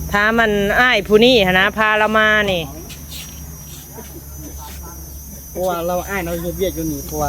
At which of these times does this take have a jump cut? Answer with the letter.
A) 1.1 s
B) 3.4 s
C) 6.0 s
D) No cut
D